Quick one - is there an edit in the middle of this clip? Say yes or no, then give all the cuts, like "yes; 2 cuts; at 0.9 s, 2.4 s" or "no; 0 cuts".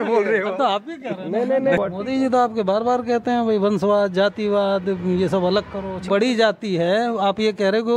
yes; 2 cuts; at 1.8 s, 6.0 s